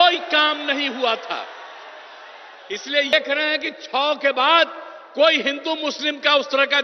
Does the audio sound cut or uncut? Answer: cut